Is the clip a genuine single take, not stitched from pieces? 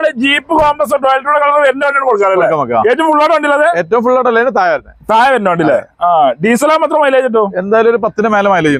yes; 0 cuts

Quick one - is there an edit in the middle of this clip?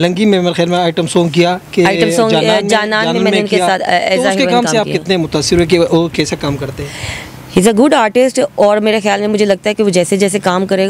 no; 0 cuts

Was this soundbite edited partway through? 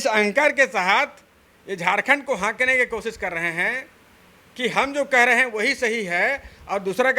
no; 0 cuts

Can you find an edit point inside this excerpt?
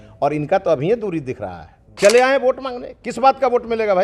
yes; 1 cut; at 2.0 s

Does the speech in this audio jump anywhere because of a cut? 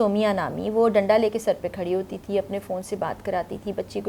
no; 0 cuts

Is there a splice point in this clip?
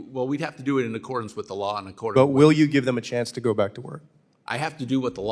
no; 0 cuts

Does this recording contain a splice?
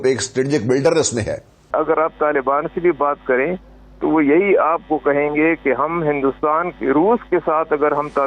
yes; 1 cut; at 1.7 s

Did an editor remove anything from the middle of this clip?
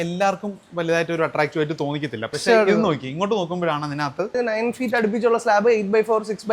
yes; 1 cut; at 4.4 s

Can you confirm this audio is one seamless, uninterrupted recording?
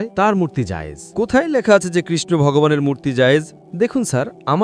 no; 1 cut; at 3.6 s

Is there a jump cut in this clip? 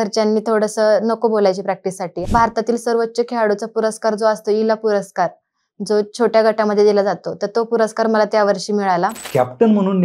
yes; 2 cuts; at 2.2 s, 9.2 s

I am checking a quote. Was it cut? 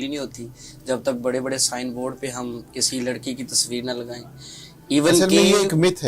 no; 0 cuts

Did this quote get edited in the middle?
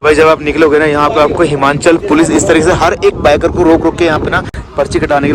no; 0 cuts

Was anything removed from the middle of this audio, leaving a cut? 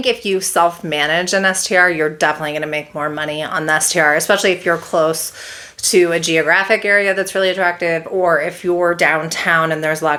no; 0 cuts

